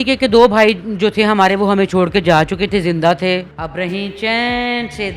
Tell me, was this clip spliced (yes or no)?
yes